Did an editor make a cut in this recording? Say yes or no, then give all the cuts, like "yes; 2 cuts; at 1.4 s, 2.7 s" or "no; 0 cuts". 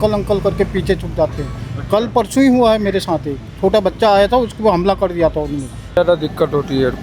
yes; 1 cut; at 6.0 s